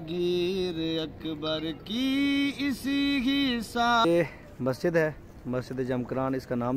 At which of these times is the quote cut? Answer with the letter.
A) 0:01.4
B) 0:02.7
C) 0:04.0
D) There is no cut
C